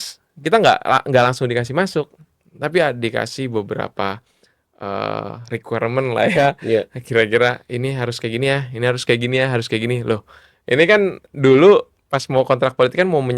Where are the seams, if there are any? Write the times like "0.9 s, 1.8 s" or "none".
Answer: none